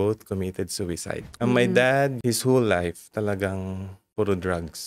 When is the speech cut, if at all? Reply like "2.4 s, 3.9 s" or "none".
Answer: 1.2 s, 2.2 s